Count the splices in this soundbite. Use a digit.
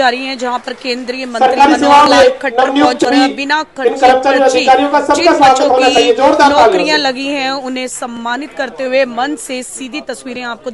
1